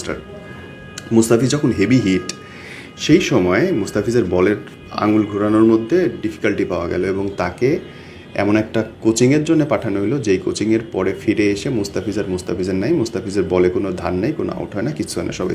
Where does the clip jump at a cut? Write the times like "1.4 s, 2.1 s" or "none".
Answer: none